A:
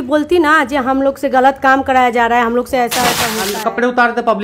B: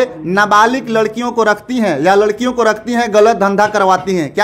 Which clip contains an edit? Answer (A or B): A